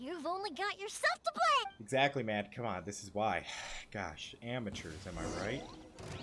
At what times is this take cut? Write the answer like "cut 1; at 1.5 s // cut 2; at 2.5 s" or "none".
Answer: none